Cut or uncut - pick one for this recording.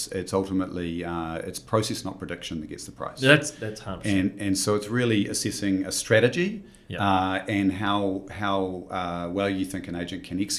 uncut